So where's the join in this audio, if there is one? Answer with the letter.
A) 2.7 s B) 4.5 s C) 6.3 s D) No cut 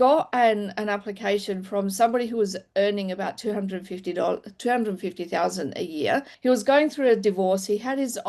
C